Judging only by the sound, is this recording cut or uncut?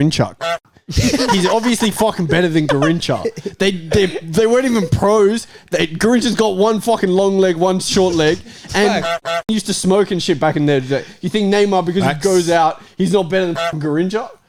uncut